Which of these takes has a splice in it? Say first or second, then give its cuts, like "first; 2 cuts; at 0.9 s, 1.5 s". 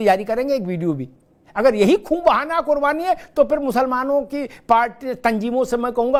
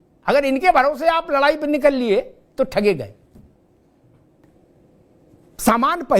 second; 1 cut; at 4.5 s